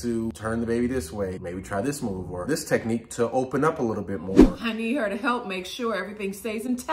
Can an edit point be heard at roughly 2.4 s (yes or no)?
yes